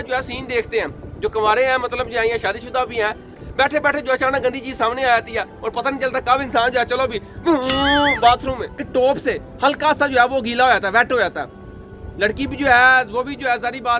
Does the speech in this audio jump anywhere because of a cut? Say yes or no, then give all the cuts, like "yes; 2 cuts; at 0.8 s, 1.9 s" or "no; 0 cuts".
yes; 2 cuts; at 3.4 s, 8.8 s